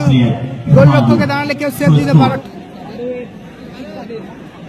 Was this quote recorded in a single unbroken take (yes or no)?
no